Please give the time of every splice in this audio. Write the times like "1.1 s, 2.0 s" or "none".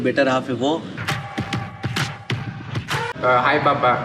none